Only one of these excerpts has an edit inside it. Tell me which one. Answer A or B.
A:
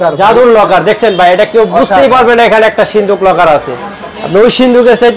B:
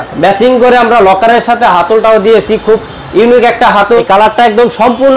B